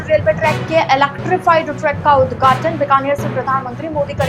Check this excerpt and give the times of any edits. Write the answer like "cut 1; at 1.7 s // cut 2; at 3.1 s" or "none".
none